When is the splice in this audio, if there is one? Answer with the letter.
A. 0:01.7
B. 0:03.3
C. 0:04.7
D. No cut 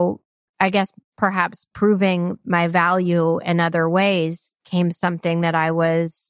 A